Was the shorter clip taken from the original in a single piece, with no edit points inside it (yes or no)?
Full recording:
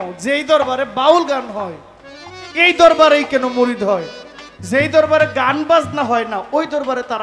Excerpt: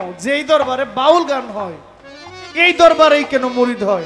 yes